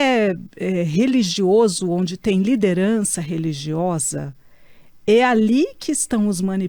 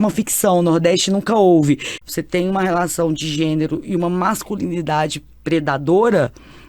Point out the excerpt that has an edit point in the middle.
second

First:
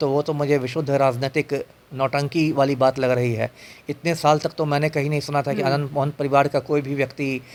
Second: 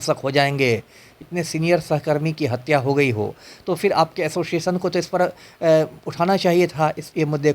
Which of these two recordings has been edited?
second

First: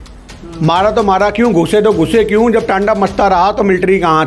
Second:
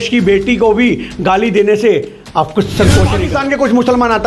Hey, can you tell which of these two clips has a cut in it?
second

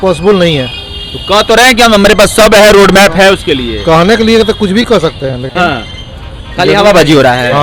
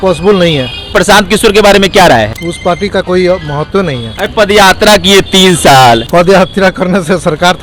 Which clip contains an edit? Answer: second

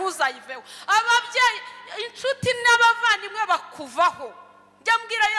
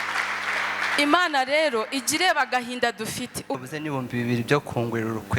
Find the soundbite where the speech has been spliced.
second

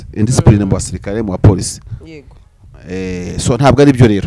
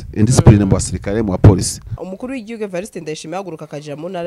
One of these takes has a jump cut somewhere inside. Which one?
second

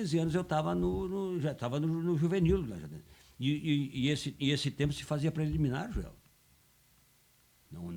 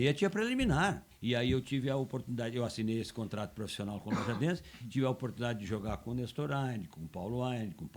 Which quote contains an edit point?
second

